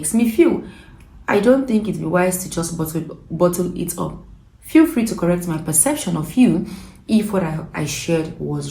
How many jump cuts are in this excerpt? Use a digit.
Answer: 0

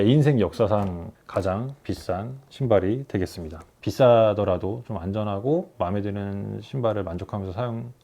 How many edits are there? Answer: 2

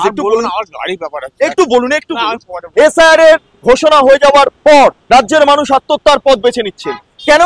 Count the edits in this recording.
3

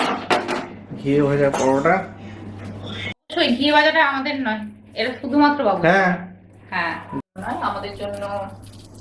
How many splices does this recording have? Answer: 2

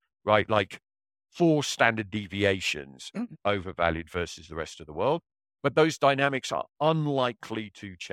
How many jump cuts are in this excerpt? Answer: 0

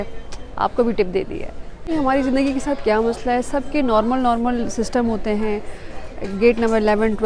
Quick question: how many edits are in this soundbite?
0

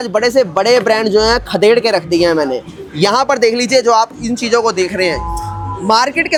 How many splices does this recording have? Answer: 0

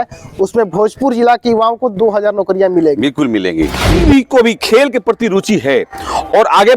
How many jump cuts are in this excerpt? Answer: 1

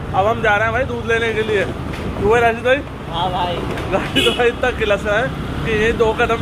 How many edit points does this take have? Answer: 0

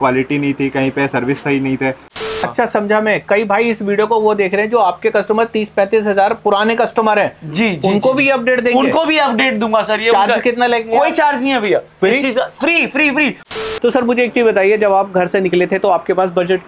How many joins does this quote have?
2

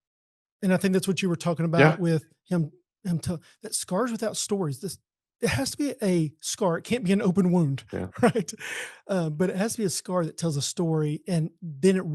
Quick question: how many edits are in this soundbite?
0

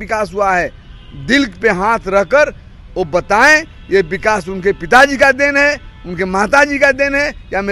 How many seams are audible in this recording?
0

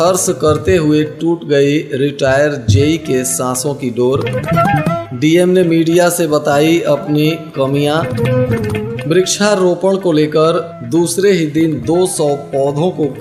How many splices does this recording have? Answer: 0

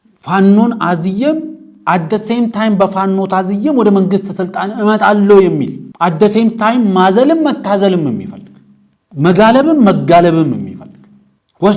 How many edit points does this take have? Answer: 0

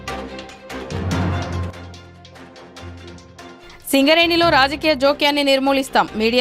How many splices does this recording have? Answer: 1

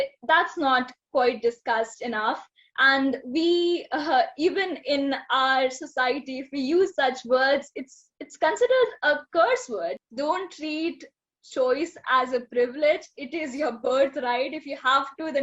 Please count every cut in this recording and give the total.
1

